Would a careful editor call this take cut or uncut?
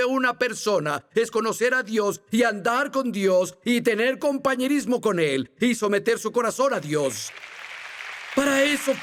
uncut